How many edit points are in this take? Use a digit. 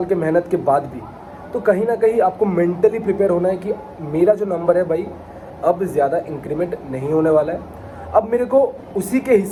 0